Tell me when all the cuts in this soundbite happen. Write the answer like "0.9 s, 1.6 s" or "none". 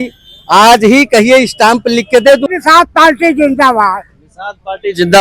2.5 s